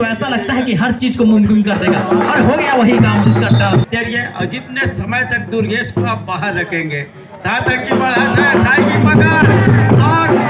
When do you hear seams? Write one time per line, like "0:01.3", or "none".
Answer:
0:03.9